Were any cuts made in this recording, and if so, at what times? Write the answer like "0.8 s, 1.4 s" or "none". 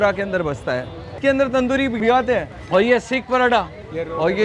0.9 s, 2.0 s